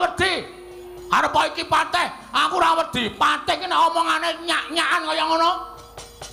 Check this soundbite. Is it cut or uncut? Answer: uncut